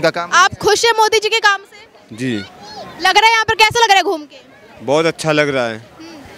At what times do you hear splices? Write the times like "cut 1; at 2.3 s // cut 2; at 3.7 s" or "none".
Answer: none